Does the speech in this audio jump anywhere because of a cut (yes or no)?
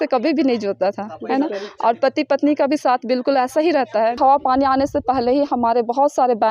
yes